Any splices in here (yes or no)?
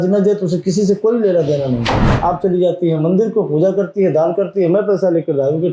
yes